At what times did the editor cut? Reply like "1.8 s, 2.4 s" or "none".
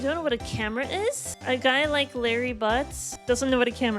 1.3 s, 3.1 s